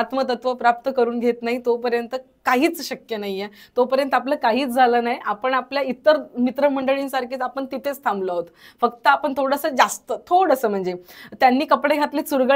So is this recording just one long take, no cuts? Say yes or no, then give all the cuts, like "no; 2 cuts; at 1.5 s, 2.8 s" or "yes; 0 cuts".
yes; 0 cuts